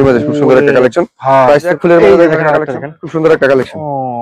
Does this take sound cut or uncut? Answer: cut